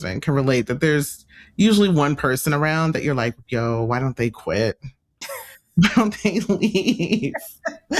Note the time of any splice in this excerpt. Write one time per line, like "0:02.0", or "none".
none

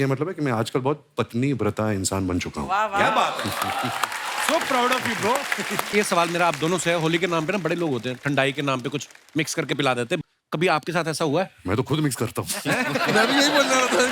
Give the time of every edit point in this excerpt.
0:05.9

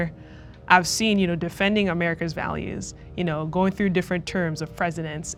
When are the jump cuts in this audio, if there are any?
none

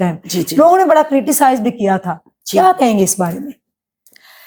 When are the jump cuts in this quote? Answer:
none

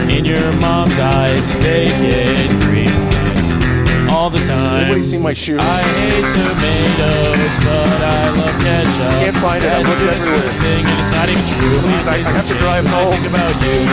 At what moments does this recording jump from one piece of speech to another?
none

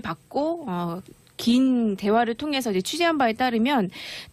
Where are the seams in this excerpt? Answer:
0:02.8

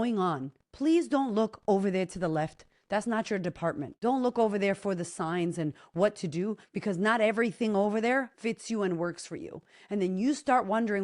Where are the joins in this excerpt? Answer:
0:03.9

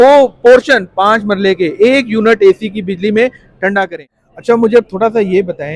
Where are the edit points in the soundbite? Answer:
0:03.9

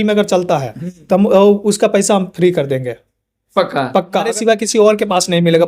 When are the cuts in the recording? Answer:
0:04.2

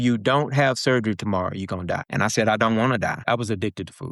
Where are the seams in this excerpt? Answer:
0:02.1
0:03.2

